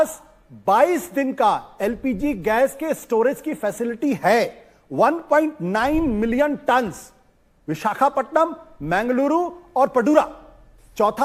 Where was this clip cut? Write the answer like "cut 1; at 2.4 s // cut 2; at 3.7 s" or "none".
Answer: none